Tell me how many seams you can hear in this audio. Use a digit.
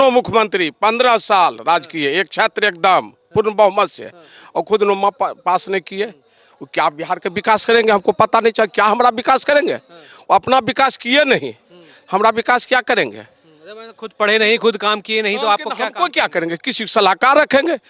0